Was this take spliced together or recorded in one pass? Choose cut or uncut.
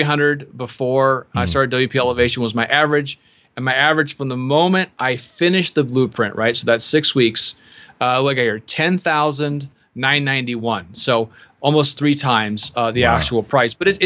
uncut